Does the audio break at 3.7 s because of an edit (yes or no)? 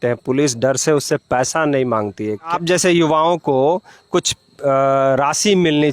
no